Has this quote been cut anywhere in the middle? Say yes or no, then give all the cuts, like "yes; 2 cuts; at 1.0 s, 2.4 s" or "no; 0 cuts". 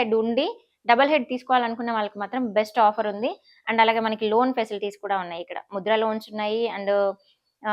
no; 0 cuts